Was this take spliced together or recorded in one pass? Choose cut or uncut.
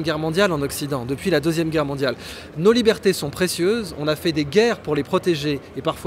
uncut